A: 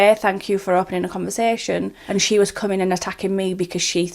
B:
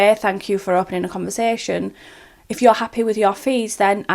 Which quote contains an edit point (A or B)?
A